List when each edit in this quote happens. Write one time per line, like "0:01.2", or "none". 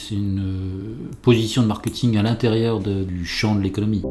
0:03.1